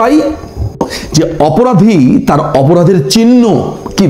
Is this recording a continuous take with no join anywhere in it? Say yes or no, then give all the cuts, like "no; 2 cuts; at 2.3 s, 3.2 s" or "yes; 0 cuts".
no; 1 cut; at 1.0 s